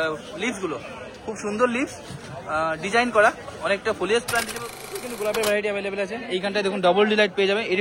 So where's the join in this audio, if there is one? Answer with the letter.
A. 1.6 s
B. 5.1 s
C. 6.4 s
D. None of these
B